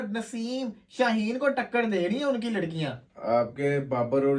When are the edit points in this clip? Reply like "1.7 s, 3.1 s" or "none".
none